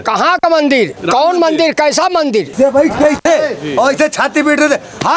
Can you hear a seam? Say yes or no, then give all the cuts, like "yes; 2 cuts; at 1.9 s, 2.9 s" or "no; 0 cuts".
yes; 2 cuts; at 1.0 s, 2.5 s